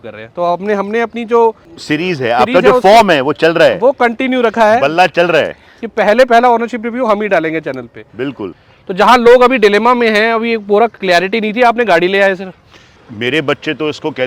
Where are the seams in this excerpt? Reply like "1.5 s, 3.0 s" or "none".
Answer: 1.7 s, 8.5 s, 12.8 s